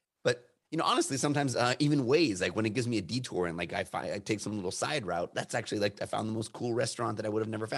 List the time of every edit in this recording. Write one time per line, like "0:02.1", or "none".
none

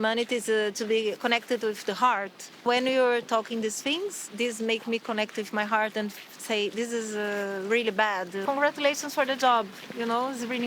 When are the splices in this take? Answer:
0:02.6
0:08.4

